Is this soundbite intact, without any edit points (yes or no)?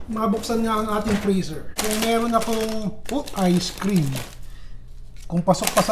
no